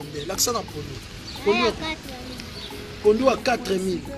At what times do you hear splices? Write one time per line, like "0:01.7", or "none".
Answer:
none